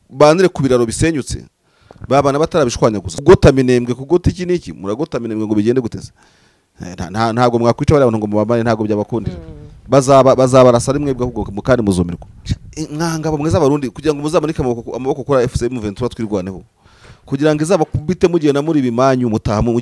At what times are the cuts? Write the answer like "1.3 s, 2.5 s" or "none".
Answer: 3.1 s, 12.3 s